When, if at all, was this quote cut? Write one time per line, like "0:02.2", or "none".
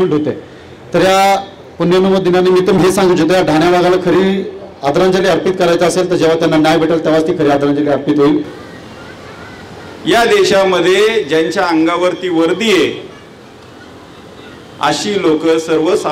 0:08.6